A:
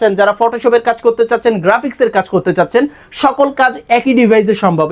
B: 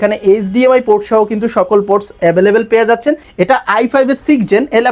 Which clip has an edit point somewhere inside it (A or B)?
B